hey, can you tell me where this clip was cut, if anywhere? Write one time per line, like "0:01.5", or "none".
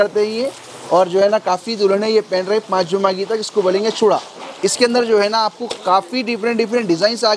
none

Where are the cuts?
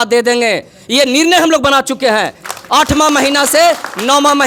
none

